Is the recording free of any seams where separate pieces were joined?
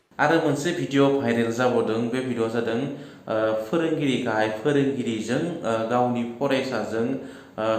yes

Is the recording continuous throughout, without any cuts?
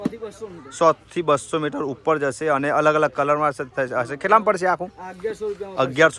yes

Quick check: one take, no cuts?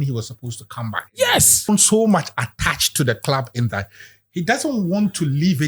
no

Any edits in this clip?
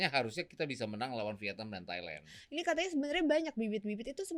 yes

